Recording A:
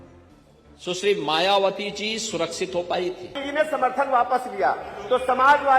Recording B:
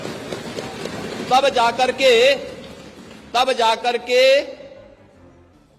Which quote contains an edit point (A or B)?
A